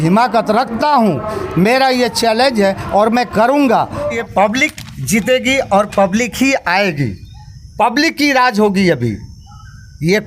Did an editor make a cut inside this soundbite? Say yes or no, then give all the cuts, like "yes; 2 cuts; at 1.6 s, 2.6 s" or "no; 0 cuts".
yes; 1 cut; at 4.0 s